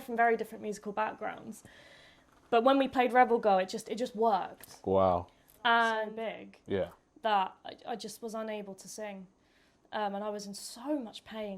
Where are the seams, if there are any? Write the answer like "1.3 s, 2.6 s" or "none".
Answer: 6.1 s